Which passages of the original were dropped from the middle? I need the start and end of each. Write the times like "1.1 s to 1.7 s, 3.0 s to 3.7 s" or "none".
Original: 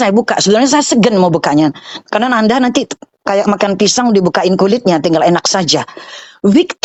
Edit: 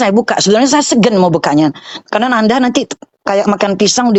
none